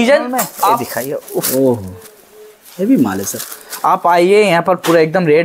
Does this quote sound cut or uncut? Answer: cut